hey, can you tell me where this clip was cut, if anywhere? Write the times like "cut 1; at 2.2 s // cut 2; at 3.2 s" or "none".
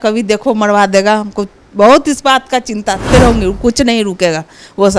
cut 1; at 3.1 s